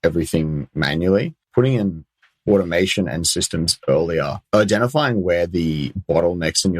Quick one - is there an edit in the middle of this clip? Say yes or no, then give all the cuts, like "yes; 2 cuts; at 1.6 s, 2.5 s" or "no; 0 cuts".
yes; 2 cuts; at 1.5 s, 4.4 s